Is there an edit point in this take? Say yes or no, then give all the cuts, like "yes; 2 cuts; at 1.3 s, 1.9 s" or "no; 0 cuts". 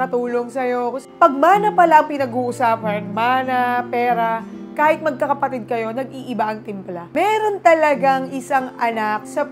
yes; 2 cuts; at 1.1 s, 7.0 s